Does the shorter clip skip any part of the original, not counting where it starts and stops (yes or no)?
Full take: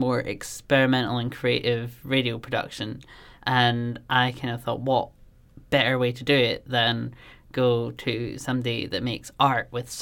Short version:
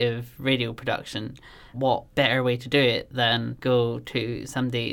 yes